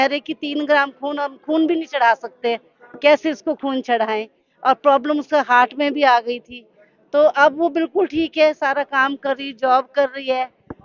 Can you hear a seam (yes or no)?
no